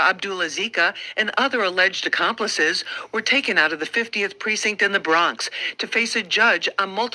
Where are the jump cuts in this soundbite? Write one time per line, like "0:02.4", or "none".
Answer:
0:02.3